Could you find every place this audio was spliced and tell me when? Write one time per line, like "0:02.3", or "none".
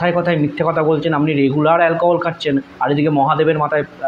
none